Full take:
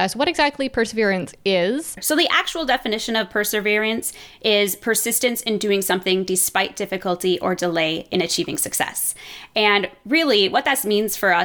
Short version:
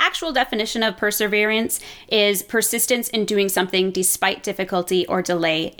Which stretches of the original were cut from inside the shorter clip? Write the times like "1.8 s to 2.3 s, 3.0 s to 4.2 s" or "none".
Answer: none